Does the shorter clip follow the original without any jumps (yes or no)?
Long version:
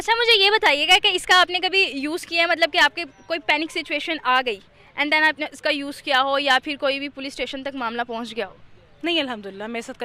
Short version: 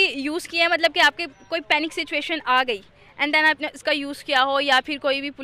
yes